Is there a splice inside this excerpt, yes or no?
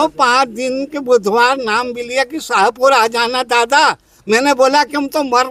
no